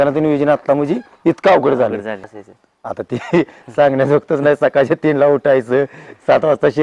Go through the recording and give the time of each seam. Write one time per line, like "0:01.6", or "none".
0:02.2